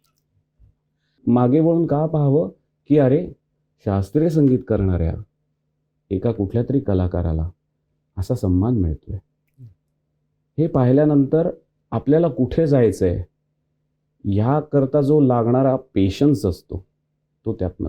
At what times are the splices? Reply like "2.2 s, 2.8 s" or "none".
1.2 s